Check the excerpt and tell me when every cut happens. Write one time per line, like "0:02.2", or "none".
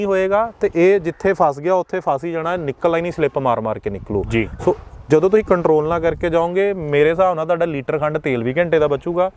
none